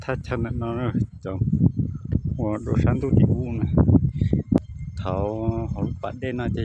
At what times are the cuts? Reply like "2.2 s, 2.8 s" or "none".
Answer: 4.6 s